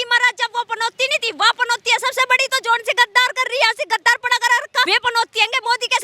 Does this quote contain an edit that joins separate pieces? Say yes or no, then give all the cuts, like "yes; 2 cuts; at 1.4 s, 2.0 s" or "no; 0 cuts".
yes; 1 cut; at 4.9 s